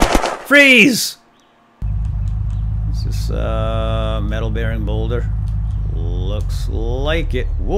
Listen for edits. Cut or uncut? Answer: cut